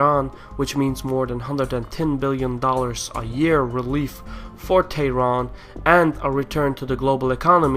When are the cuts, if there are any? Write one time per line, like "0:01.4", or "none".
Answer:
0:02.4